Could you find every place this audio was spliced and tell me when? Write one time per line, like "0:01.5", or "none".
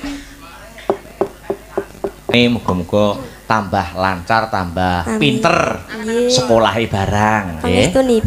0:02.3